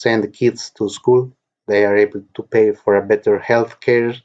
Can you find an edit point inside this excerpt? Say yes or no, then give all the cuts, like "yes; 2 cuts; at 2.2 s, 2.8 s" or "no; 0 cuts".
no; 0 cuts